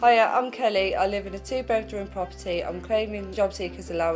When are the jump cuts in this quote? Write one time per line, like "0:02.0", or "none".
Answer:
0:03.2